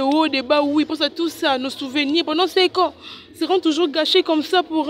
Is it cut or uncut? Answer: uncut